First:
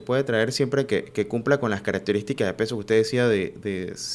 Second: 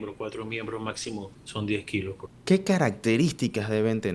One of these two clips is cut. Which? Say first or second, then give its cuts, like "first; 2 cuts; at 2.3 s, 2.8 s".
second; 2 cuts; at 1.4 s, 2.3 s